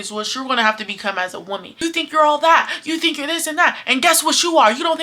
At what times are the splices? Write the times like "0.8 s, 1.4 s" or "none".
1.7 s